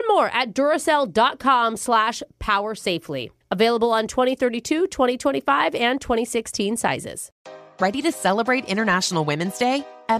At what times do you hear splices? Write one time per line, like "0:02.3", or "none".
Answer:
0:07.3

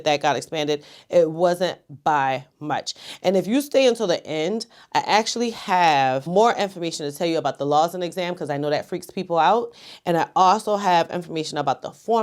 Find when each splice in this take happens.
none

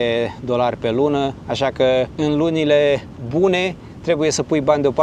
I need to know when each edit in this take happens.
none

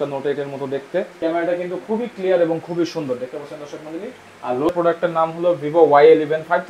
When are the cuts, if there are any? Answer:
0:01.1
0:04.7

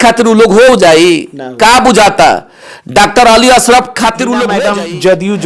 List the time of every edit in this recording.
0:04.5

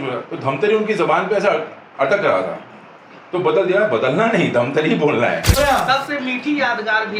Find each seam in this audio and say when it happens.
0:05.6

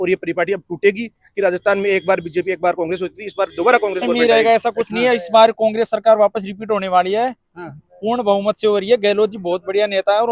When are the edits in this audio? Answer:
0:04.1

